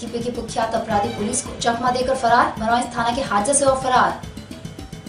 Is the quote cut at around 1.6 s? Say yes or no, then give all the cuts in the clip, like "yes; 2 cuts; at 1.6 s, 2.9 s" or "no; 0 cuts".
no; 1 cut; at 4.2 s